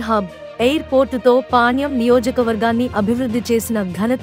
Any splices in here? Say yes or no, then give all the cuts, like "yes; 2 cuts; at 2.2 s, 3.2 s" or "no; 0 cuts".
no; 0 cuts